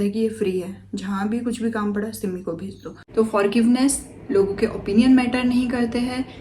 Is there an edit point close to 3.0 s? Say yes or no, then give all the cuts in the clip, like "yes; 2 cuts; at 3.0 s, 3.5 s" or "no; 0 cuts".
yes; 1 cut; at 3.0 s